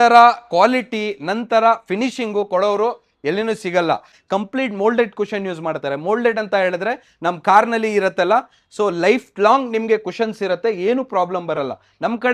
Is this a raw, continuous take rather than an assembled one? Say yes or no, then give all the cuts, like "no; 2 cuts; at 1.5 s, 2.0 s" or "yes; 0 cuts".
no; 1 cut; at 4.2 s